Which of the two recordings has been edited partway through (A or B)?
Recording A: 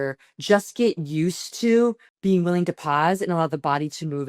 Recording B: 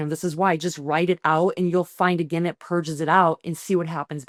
A